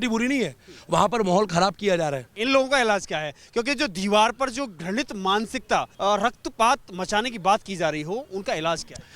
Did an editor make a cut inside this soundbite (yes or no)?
yes